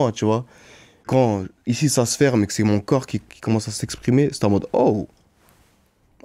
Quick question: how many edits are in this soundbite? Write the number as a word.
one